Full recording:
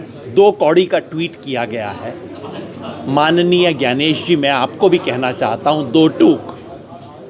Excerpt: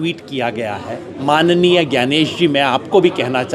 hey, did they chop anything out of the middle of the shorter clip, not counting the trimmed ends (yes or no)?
yes